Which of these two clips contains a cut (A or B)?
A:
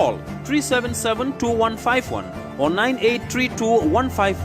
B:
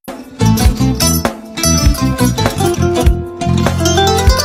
A